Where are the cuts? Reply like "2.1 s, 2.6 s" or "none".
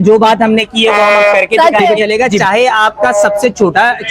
2.0 s

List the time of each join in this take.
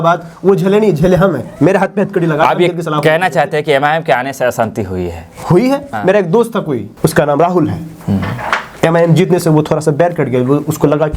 5.9 s, 6.9 s

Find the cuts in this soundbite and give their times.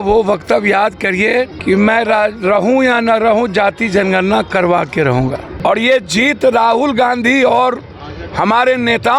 1.6 s, 5.5 s

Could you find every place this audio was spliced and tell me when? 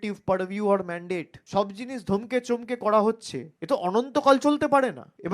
1.4 s

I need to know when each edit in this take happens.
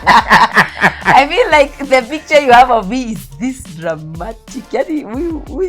none

